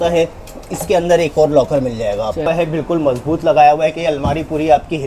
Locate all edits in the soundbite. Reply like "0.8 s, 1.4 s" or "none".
2.5 s